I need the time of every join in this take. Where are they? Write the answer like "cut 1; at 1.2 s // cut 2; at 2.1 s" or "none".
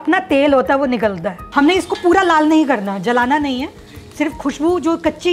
cut 1; at 1.3 s